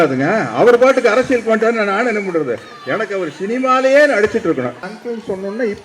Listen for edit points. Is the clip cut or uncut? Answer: cut